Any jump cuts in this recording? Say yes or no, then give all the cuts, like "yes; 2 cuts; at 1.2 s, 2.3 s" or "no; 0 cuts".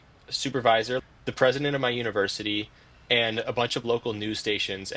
yes; 1 cut; at 1.0 s